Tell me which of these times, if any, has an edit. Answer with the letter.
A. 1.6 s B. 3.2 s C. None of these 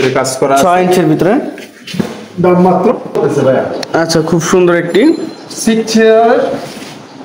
B